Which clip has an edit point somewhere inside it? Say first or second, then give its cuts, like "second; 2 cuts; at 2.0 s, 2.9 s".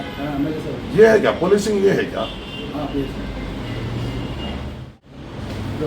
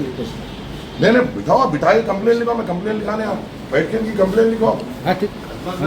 first; 1 cut; at 4.9 s